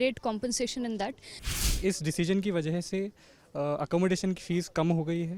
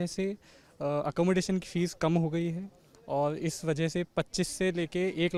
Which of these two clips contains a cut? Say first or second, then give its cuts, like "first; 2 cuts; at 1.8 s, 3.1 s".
first; 1 cut; at 1.6 s